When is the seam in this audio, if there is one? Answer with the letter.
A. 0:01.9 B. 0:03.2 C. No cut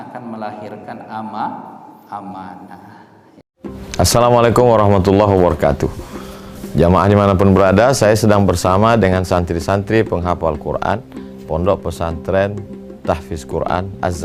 B